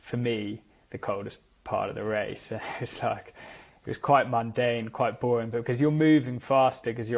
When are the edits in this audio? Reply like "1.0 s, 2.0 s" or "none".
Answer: none

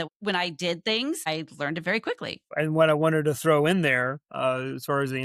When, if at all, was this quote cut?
1.3 s, 2.5 s

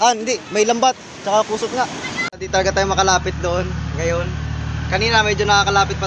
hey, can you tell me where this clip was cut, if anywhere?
2.2 s

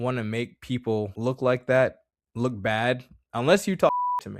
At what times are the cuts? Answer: 1.1 s

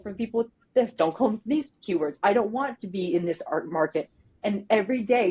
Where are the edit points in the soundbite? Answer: none

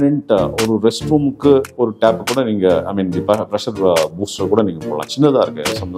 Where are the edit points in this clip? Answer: none

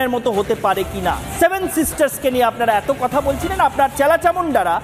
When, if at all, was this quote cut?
1.3 s

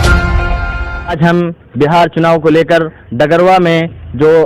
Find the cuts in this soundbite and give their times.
1.2 s

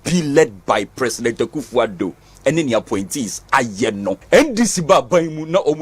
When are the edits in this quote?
4.2 s

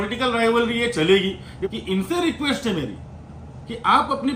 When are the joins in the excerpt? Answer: 1.6 s

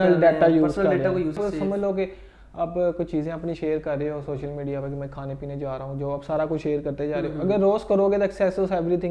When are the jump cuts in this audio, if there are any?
1.4 s

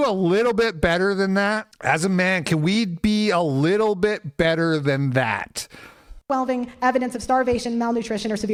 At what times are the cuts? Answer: none

